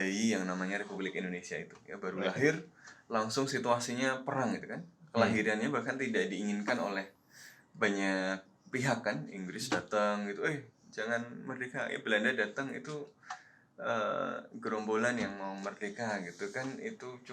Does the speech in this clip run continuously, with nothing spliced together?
yes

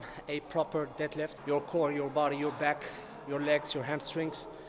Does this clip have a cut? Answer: yes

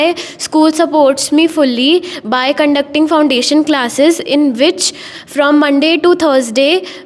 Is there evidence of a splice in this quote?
no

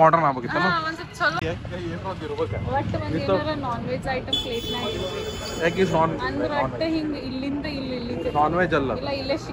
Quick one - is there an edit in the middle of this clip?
yes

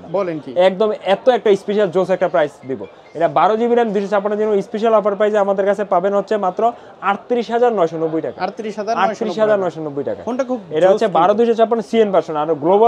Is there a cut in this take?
no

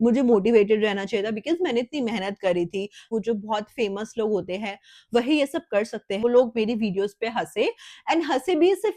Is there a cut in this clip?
yes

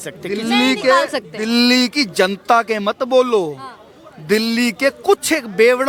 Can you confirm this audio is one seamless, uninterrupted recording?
yes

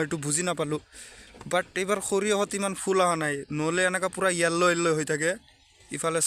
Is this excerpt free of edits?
yes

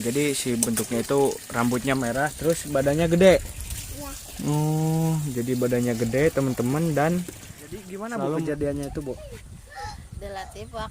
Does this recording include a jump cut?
yes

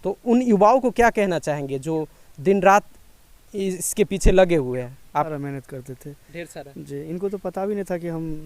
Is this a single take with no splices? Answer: no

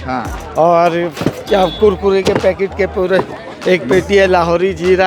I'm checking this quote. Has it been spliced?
no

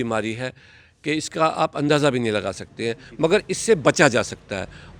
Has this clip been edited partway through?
no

